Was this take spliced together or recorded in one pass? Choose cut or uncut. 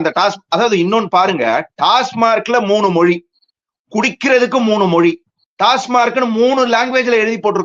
uncut